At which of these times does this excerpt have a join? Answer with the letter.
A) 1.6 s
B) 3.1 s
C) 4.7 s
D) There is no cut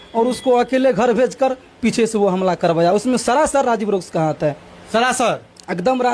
D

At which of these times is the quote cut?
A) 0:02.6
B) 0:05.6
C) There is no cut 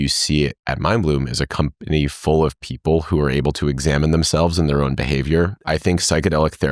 B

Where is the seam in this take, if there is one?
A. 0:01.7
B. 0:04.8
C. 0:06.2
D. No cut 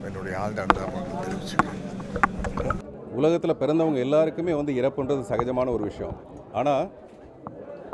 D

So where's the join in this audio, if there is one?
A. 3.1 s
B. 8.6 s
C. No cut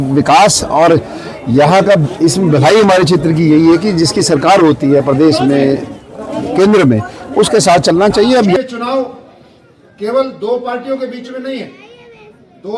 B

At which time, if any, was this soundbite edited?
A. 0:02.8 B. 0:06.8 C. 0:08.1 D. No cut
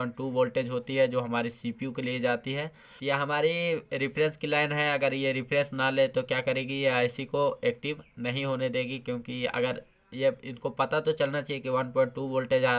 A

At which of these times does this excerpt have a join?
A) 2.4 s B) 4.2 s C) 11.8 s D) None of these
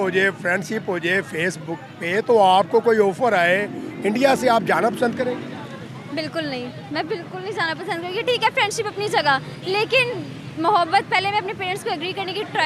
D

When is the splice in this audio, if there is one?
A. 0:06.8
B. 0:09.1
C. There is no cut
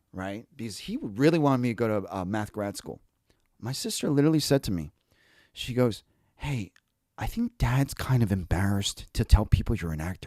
C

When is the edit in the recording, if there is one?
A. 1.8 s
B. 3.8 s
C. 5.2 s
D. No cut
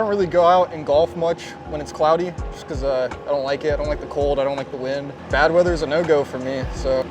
C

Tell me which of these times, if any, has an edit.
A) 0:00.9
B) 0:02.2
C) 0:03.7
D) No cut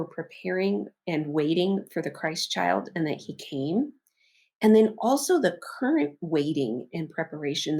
A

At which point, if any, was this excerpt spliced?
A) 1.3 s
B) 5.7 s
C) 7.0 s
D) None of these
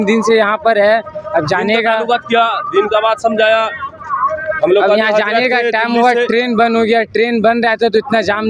D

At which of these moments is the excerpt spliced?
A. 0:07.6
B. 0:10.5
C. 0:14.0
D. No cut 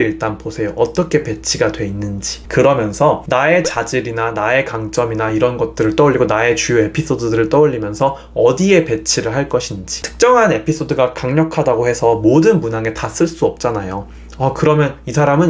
D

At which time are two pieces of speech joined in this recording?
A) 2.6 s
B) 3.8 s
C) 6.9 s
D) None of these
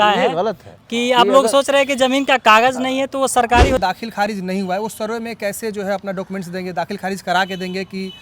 B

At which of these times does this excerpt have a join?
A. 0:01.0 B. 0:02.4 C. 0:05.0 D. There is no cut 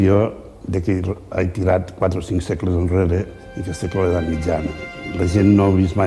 C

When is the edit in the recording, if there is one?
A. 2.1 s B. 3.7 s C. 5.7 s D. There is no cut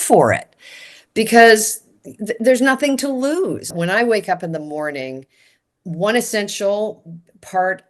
B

